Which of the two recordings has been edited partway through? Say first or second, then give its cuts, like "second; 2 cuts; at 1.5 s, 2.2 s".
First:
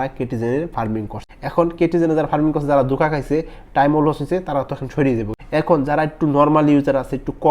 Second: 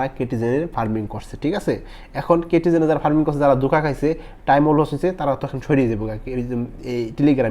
first; 2 cuts; at 1.2 s, 5.4 s